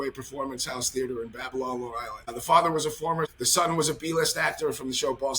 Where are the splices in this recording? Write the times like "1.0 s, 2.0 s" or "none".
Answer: 2.2 s, 3.4 s